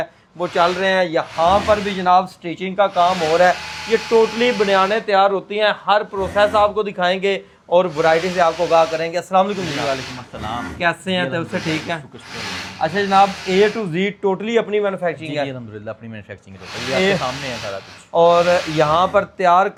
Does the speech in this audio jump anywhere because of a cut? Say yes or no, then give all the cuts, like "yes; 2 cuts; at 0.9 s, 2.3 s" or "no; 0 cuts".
no; 0 cuts